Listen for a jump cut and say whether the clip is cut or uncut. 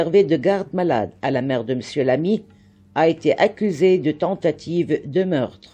uncut